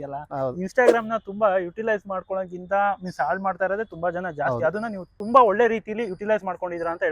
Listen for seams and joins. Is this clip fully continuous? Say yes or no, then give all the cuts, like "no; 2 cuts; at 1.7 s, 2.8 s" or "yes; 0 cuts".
no; 1 cut; at 5.1 s